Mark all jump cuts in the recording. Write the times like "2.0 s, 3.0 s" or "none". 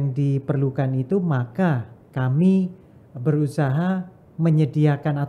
none